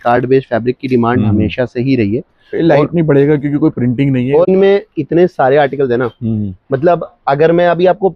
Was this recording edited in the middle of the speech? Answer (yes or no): yes